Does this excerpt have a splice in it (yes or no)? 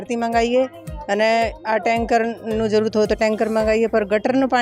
no